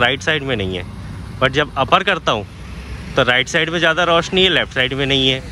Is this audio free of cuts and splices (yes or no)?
yes